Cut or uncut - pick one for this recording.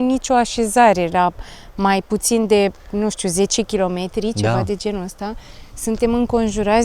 uncut